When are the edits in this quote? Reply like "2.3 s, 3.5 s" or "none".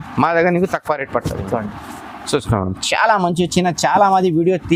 none